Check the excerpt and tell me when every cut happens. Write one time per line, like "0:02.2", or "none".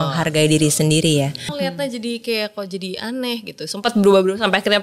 0:01.5